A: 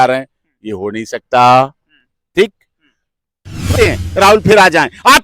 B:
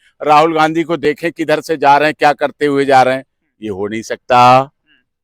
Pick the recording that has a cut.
A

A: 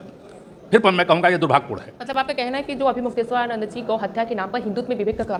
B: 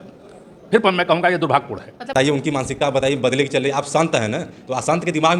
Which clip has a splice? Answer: B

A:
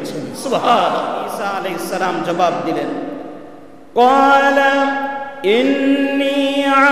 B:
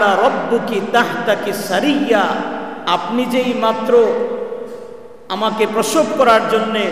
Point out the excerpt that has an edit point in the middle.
A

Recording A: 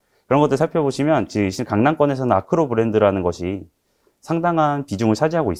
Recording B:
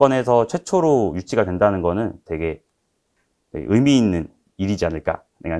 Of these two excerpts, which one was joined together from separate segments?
B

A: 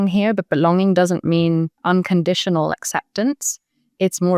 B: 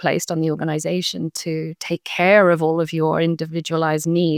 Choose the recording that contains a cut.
A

